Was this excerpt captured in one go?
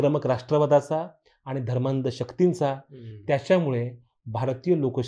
yes; 0 cuts

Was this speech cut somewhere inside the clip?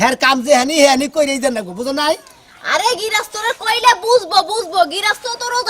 no; 0 cuts

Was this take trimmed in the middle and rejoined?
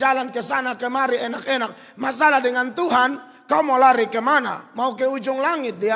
no; 0 cuts

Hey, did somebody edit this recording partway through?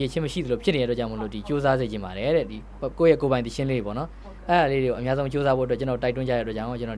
no; 0 cuts

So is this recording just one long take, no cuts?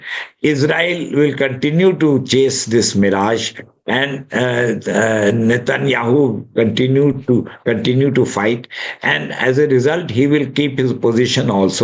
yes; 0 cuts

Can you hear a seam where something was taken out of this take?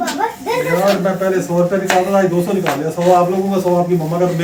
no; 0 cuts

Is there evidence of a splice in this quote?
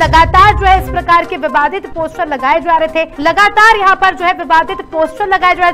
yes; 1 cut; at 3.1 s

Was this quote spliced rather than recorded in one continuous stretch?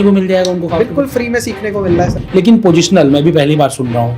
yes; 1 cut; at 2.2 s

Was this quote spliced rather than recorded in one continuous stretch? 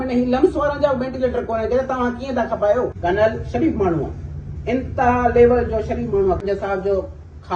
yes; 2 cuts; at 2.9 s, 6.4 s

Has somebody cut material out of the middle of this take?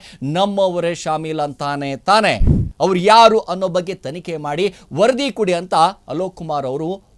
no; 0 cuts

